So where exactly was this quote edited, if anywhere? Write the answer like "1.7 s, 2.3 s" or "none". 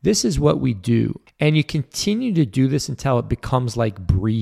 1.2 s